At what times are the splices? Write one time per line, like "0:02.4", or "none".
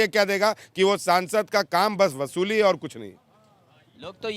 none

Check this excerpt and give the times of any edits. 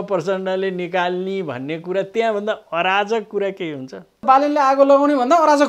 0:04.2

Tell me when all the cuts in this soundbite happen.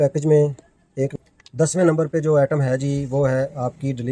0:01.1

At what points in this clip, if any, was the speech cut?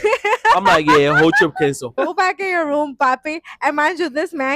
0:01.9

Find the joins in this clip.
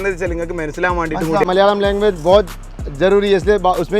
0:01.5

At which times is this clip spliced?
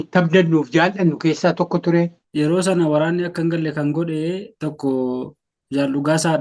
0:02.2

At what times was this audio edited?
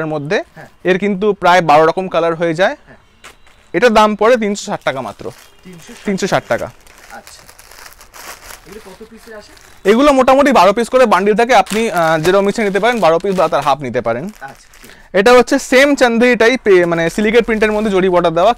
none

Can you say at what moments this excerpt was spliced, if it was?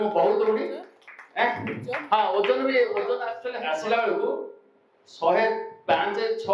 0:03.6

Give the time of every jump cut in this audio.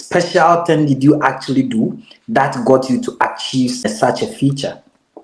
0:03.8

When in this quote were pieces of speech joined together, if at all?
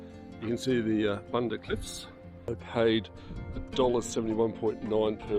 0:02.6

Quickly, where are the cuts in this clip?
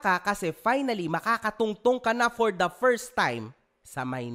none

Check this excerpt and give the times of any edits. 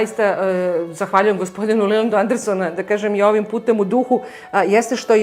none

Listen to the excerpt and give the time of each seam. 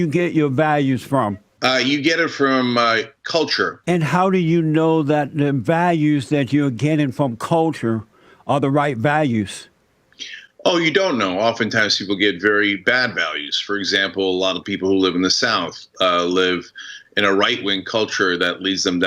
0:01.5
0:03.8

